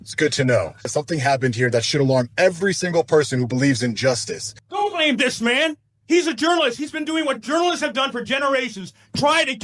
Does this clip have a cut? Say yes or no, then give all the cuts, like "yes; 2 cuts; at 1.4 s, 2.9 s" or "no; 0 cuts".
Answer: yes; 3 cuts; at 0.9 s, 4.6 s, 5.9 s